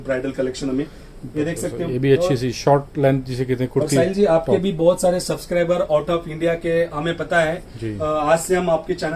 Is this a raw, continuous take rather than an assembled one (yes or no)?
yes